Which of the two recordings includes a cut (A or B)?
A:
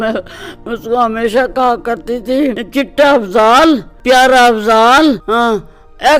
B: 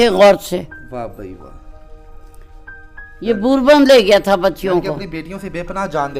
A